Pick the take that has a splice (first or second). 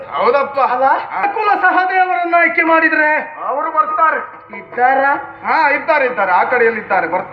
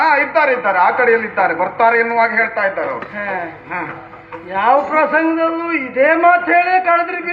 first